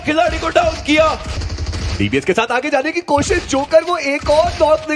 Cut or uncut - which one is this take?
cut